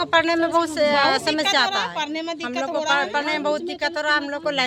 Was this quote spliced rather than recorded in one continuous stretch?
no; 0 cuts

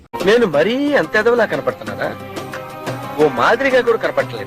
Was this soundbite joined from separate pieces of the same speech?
no; 0 cuts

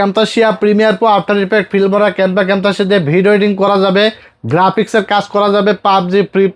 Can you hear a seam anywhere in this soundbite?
no; 0 cuts

